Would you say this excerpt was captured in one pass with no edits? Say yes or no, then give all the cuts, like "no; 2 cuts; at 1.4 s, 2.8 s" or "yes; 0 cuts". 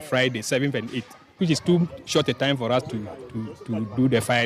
no; 1 cut; at 1.4 s